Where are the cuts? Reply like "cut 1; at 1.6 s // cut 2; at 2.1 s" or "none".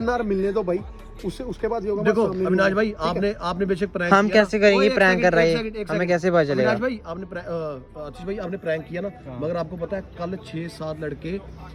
none